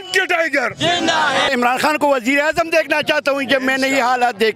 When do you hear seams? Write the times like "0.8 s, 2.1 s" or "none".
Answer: 1.5 s